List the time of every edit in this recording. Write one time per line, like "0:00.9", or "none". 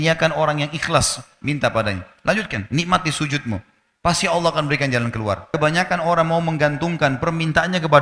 0:05.5